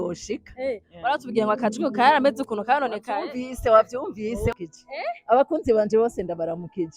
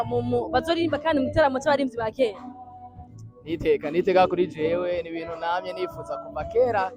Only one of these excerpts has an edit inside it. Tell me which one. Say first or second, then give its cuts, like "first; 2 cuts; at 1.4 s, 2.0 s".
first; 1 cut; at 4.5 s